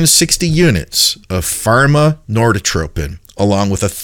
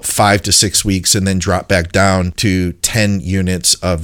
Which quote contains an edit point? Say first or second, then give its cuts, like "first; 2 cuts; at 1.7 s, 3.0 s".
second; 1 cut; at 2.3 s